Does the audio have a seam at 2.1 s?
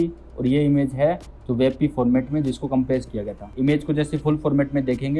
no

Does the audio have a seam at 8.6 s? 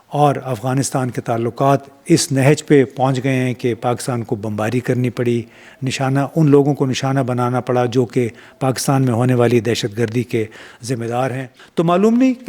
no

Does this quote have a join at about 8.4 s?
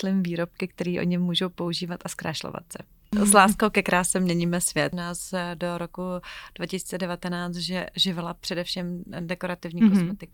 no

